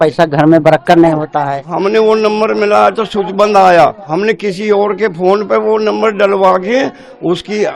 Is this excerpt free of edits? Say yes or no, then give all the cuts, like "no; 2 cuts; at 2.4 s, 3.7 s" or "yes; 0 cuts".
no; 2 cuts; at 1.7 s, 4.0 s